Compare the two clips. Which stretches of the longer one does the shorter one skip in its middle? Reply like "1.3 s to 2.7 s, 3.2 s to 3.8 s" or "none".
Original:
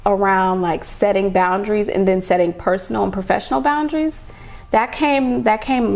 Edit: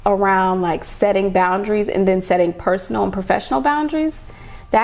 none